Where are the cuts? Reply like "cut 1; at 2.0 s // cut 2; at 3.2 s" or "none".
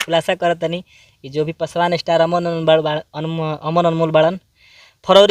none